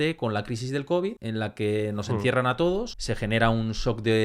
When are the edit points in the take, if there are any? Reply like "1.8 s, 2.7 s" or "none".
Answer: 1.2 s, 3.0 s